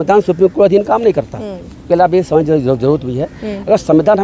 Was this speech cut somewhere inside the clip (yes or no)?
no